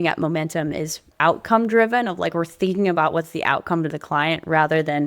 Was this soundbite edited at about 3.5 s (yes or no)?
no